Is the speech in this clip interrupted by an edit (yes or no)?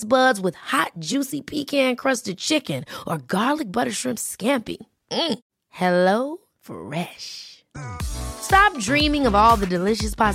no